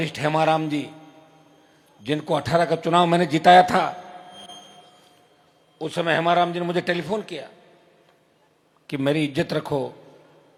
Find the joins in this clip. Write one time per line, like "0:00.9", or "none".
none